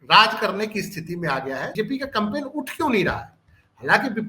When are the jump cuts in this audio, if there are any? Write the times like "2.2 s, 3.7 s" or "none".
1.7 s